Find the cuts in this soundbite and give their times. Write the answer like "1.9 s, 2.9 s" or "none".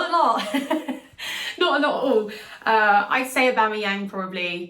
none